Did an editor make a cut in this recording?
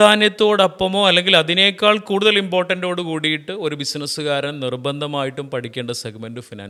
no; 0 cuts

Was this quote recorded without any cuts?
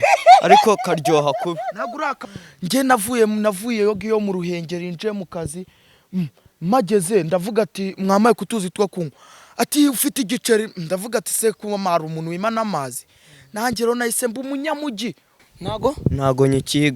no; 2 cuts; at 2.2 s, 15.3 s

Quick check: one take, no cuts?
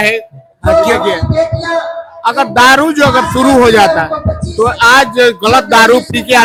yes; 0 cuts

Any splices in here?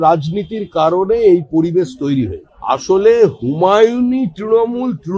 yes; 1 cut; at 2.5 s

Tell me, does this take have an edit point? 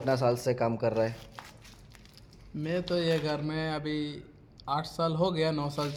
no; 0 cuts

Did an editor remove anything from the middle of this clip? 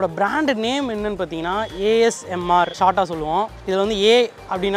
no; 0 cuts

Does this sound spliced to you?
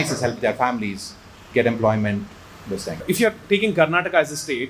yes; 1 cut; at 2.9 s

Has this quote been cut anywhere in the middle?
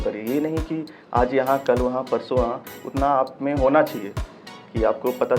yes; 1 cut; at 2.7 s

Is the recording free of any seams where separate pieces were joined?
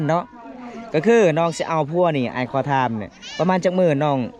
yes; 0 cuts

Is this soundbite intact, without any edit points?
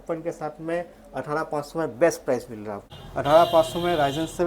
no; 1 cut; at 3.0 s

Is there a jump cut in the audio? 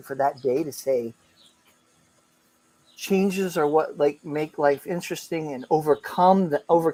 no; 0 cuts

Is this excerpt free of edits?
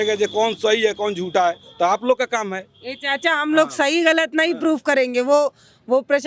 yes; 0 cuts

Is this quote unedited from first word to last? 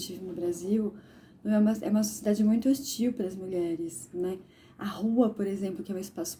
yes; 0 cuts

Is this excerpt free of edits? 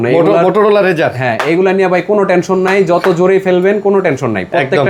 yes; 0 cuts

